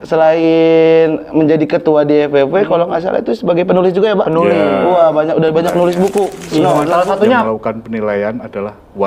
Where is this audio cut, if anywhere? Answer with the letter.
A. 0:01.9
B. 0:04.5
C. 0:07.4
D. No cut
C